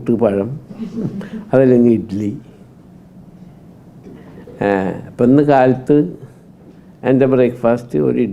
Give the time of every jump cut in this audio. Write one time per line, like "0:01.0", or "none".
none